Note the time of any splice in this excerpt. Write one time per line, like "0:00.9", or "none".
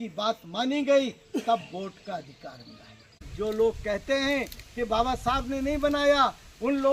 0:03.3